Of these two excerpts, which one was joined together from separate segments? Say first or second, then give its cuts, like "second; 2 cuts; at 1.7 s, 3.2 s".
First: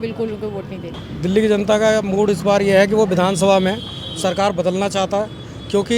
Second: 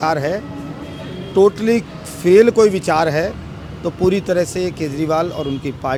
first; 1 cut; at 1.0 s